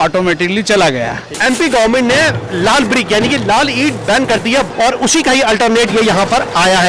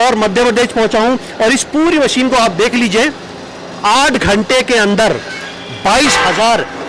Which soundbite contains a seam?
first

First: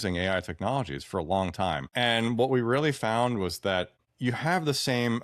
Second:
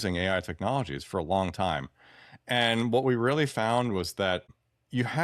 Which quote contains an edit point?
first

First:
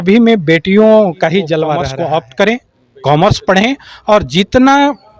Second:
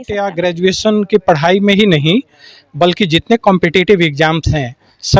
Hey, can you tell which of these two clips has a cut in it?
first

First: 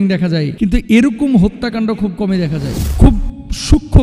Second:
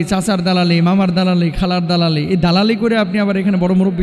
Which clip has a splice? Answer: first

